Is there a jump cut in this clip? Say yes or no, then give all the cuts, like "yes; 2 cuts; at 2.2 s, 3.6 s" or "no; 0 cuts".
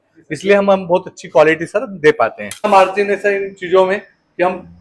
yes; 1 cut; at 2.7 s